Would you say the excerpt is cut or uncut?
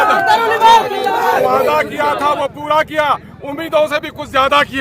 cut